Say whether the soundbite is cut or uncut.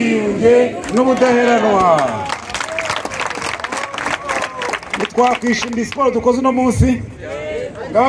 uncut